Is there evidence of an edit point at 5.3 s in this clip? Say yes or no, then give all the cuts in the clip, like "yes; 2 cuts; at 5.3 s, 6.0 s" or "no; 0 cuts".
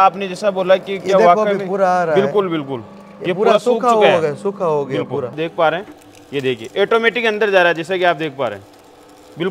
yes; 1 cut; at 5.3 s